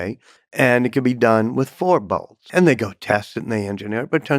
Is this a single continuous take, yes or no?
no